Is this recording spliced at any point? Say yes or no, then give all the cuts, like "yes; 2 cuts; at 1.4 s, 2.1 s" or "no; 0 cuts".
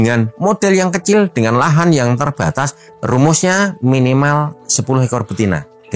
no; 0 cuts